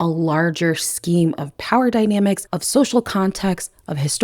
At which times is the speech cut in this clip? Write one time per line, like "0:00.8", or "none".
0:02.5